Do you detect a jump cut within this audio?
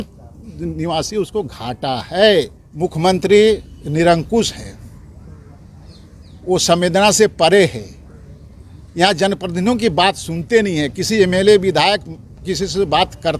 yes; 1 cut; at 2.6 s

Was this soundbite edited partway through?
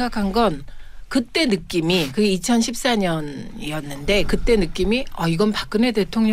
no; 0 cuts

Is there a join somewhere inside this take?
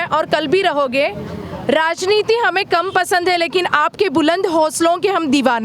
no; 0 cuts

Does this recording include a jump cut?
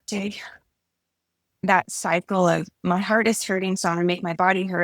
yes; 1 cut; at 1.6 s

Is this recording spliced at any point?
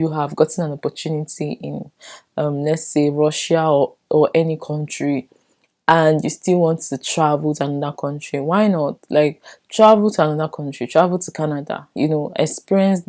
no; 0 cuts

